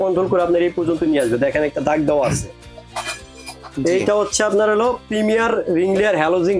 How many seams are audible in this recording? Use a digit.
0